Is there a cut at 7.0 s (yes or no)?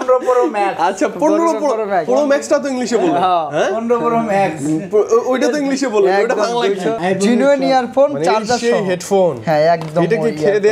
yes